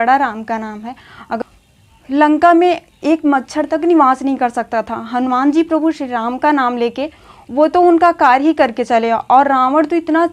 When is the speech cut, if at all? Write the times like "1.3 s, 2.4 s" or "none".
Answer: 1.4 s